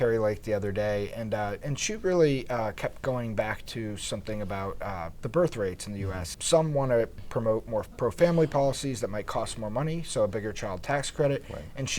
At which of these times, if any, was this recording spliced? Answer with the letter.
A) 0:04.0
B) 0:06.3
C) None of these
B